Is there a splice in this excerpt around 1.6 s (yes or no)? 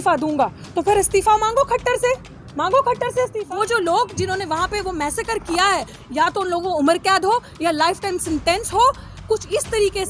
no